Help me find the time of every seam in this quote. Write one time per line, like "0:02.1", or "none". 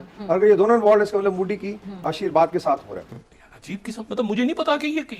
0:03.0